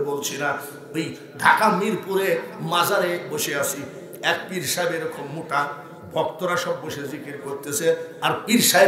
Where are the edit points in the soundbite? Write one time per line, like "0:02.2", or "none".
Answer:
none

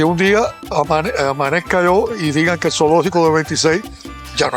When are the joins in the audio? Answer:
none

